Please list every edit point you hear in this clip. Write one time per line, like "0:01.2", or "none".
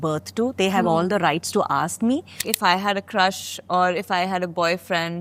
0:02.5